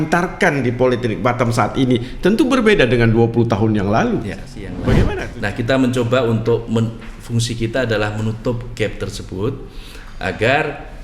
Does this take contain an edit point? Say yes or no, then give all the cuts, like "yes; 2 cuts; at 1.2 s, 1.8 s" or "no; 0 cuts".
yes; 1 cut; at 5.1 s